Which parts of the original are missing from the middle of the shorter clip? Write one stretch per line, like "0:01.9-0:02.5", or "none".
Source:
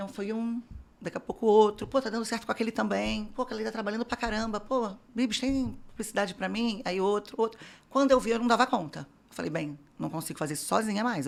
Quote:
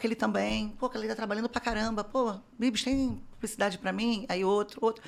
none